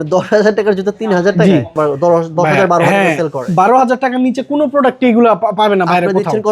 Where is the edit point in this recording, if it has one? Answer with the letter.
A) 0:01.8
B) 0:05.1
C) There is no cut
A